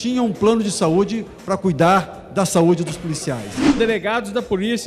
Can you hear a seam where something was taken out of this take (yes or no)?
yes